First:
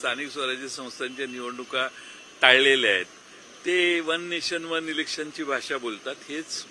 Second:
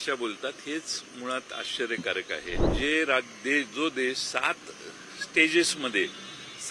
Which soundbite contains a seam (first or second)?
second